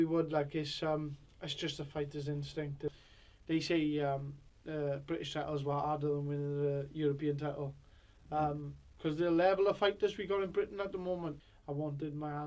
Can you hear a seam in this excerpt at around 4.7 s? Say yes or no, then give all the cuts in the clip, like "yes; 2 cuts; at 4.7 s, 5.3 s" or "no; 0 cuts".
no; 2 cuts; at 2.9 s, 11.4 s